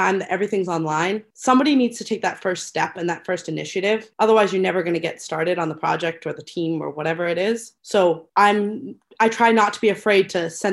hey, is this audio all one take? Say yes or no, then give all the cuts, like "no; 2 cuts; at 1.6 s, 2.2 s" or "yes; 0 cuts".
yes; 0 cuts